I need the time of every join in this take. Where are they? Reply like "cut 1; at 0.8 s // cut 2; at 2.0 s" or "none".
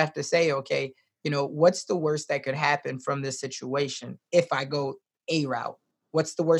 none